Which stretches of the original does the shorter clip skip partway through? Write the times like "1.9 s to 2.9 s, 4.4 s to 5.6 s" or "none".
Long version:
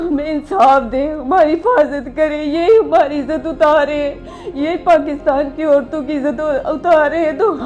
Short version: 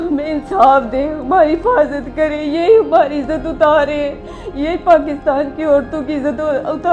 none